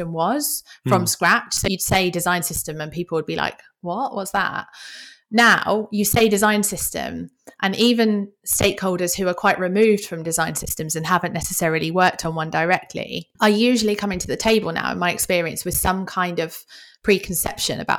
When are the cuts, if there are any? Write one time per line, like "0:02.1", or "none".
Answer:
0:01.6
0:13.2